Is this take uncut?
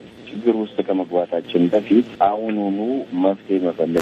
yes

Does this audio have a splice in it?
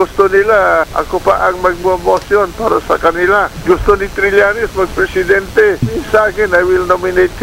no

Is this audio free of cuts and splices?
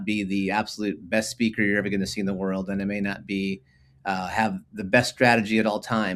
yes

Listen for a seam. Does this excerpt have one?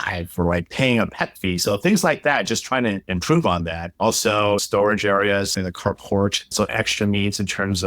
yes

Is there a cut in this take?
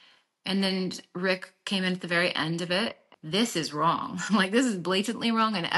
yes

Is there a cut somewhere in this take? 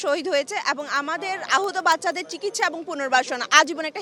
no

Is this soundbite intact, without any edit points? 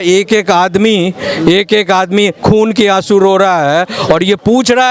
yes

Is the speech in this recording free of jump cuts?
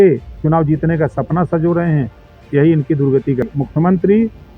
no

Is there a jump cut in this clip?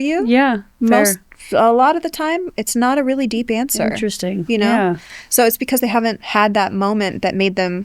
no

